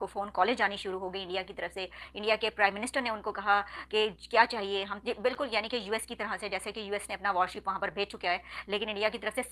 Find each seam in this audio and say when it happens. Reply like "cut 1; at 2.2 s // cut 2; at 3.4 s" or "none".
none